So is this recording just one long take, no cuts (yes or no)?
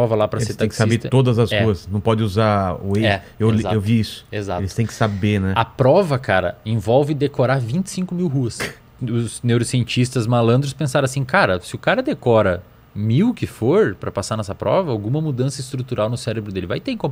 no